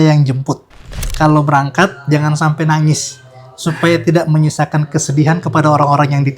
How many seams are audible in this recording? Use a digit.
1